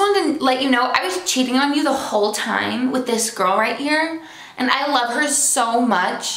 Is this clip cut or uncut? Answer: uncut